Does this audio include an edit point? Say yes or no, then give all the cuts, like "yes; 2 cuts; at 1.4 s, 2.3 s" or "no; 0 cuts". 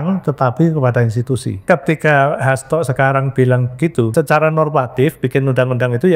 yes; 2 cuts; at 1.6 s, 4.1 s